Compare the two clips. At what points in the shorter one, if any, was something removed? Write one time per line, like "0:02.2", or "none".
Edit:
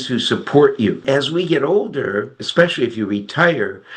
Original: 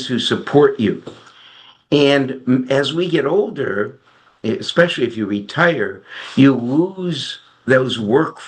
0:01.0
0:02.4